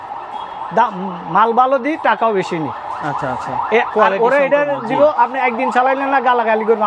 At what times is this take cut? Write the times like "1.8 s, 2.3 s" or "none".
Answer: none